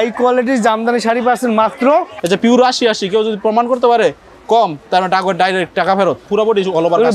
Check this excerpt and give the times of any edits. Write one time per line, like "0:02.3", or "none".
0:02.1
0:06.2